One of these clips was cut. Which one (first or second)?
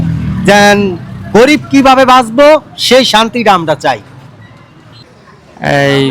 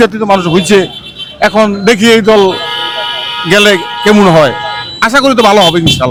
first